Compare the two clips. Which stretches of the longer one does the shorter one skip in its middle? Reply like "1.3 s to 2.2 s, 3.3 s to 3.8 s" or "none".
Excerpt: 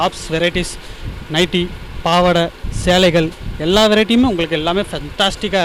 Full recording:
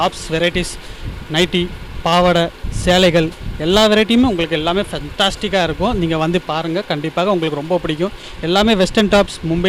none